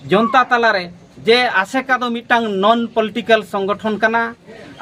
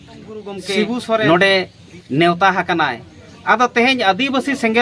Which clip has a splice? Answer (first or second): second